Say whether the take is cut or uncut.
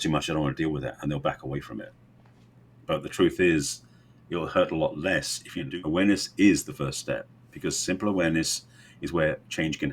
cut